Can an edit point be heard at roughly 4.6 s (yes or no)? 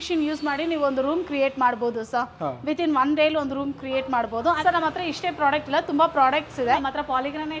yes